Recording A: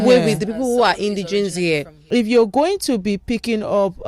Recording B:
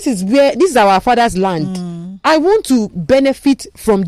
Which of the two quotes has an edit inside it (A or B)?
A